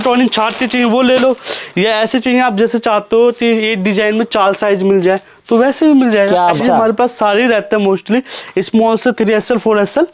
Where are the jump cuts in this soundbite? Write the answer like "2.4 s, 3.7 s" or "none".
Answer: 6.6 s